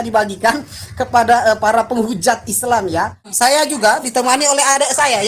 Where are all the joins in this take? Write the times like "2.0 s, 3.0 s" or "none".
3.2 s

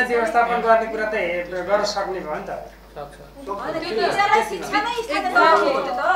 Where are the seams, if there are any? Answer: none

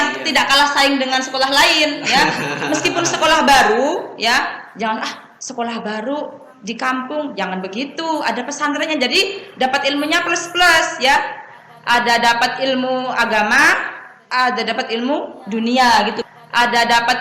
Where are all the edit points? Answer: 16.2 s

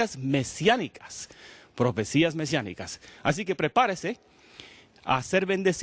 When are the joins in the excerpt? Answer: 2.2 s

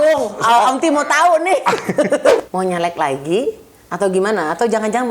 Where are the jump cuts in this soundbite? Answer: 2.3 s

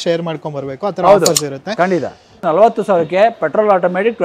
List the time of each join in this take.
2.4 s

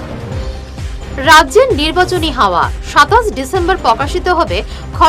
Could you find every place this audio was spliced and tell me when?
1.1 s

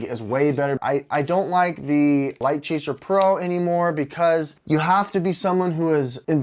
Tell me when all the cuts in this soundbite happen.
0.8 s, 2.4 s, 4.6 s

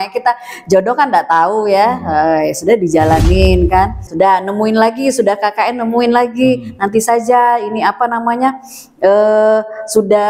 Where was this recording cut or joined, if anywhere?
4.0 s

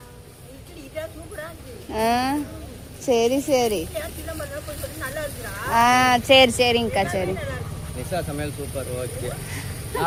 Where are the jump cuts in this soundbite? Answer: none

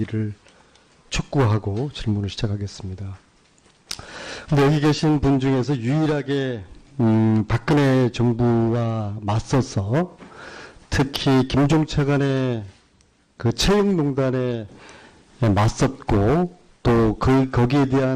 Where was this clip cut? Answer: 9.4 s

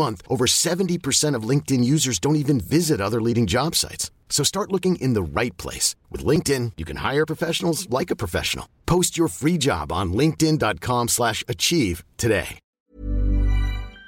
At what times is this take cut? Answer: 12.6 s

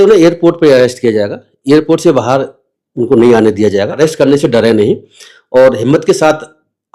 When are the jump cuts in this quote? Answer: 3.9 s

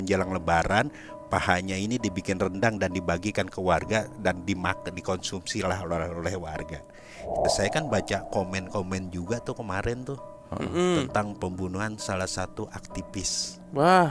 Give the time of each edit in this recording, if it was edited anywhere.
7.5 s

